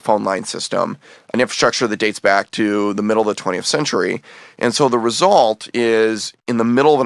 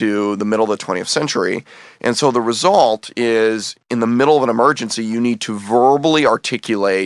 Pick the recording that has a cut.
first; 1 cut; at 1.3 s

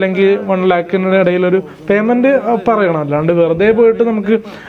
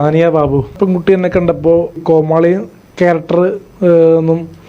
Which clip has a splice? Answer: second; 2 cuts; at 0.7 s, 2.0 s

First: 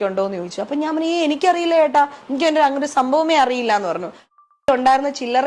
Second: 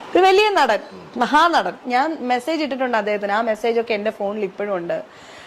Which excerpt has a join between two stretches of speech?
first; 1 cut; at 4.5 s

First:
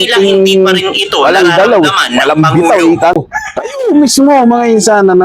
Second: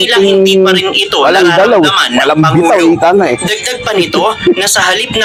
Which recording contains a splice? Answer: first; 1 cut; at 3.1 s

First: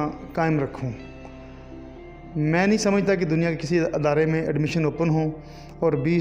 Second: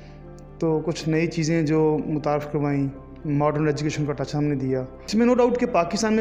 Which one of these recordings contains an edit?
second; 1 cut; at 5.0 s

